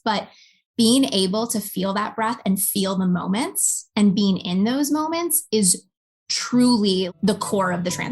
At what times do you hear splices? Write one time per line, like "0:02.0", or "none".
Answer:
0:07.1